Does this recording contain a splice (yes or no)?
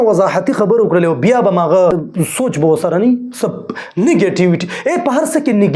yes